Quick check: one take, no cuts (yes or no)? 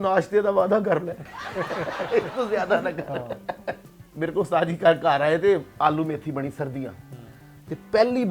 no